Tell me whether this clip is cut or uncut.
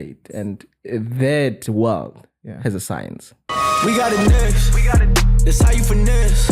cut